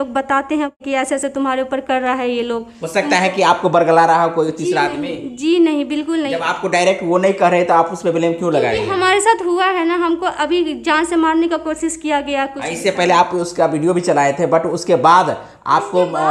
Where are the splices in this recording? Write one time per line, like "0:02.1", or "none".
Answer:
0:01.1